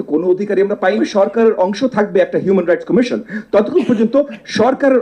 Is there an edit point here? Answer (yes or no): yes